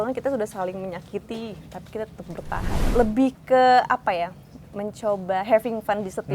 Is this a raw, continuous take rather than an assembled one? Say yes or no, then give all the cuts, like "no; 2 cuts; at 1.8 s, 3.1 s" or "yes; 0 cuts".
no; 1 cut; at 2.9 s